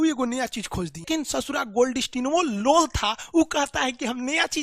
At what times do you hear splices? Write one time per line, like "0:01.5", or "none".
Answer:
0:01.0